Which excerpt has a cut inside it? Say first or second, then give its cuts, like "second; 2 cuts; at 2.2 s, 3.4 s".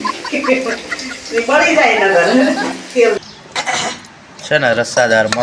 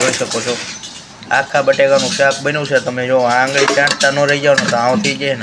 first; 1 cut; at 3.2 s